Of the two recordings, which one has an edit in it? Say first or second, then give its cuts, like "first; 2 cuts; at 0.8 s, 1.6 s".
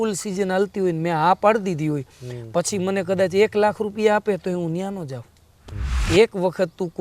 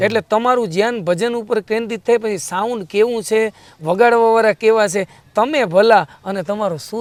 first; 1 cut; at 6.0 s